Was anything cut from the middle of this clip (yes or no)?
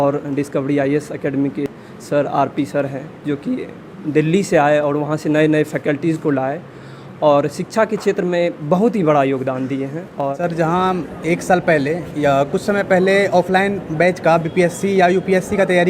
yes